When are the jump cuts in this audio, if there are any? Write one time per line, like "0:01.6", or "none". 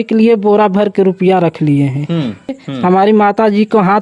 0:02.6